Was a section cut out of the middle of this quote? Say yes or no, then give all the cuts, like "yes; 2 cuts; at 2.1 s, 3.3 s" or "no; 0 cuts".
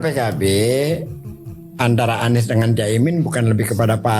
no; 0 cuts